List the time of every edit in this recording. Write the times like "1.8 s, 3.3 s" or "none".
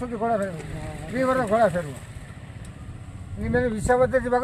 none